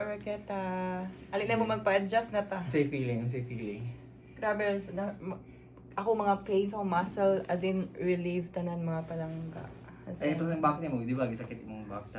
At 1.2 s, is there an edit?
yes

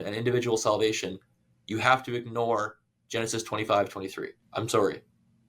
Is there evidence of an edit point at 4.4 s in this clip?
yes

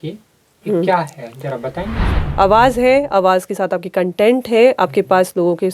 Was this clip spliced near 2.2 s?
yes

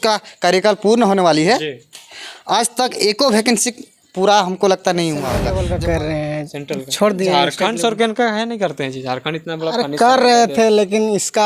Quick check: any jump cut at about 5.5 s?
yes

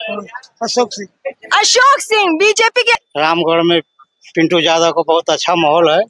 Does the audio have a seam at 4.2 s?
no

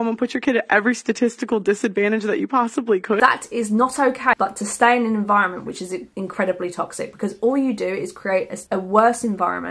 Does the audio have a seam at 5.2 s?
no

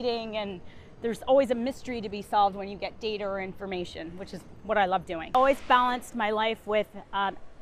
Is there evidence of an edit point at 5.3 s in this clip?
yes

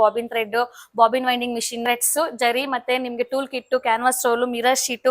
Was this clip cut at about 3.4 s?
no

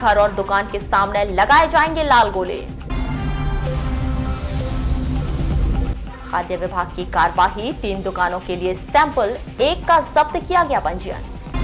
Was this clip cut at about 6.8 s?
no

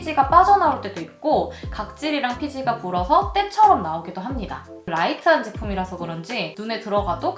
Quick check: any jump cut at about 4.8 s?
yes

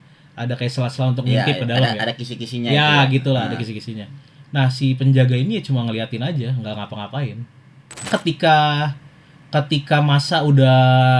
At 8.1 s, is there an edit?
yes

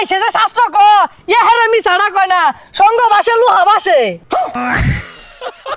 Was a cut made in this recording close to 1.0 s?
no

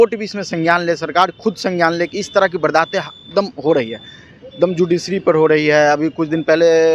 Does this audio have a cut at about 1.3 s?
no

